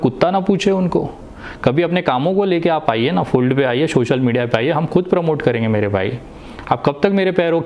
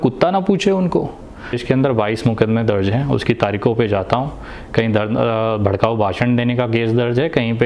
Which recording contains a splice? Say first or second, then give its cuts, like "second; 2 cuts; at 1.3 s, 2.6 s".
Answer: second; 1 cut; at 1.6 s